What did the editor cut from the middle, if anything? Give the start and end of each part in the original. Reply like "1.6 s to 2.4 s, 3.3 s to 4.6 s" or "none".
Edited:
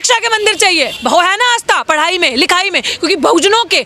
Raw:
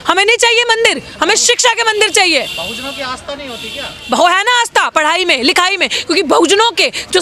2.5 s to 4.0 s